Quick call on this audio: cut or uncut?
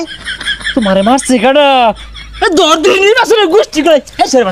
uncut